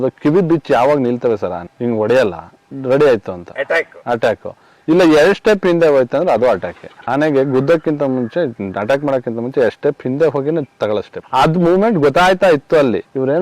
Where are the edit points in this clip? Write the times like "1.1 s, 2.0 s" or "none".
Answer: none